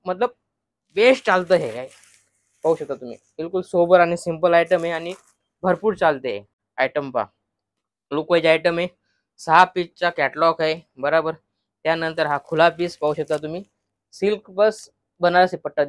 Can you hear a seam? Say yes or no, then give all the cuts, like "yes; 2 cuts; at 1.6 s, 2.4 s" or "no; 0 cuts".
yes; 1 cut; at 6.6 s